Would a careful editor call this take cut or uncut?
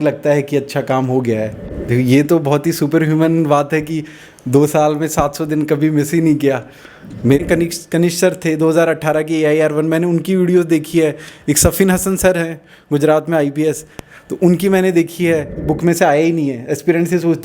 cut